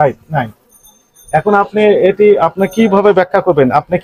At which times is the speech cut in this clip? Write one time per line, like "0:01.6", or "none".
none